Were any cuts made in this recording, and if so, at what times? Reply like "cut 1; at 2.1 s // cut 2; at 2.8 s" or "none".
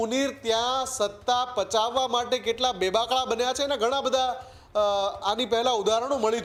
none